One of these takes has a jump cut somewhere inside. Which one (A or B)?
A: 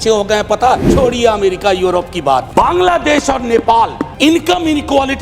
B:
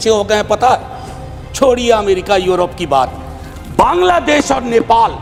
A